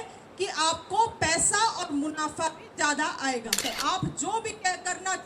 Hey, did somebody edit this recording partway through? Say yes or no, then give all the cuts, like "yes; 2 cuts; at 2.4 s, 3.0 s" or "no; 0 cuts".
yes; 1 cut; at 3.7 s